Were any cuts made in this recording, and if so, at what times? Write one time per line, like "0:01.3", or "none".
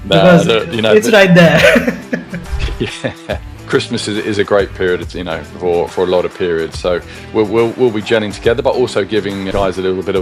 0:02.5